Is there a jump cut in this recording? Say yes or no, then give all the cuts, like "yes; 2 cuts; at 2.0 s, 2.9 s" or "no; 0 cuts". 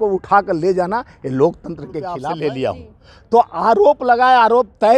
yes; 1 cut; at 2.2 s